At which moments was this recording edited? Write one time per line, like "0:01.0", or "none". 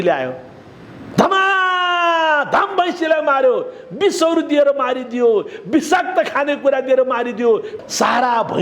0:07.7